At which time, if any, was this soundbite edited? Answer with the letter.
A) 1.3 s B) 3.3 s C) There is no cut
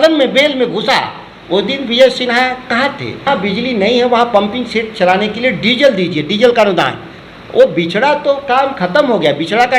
B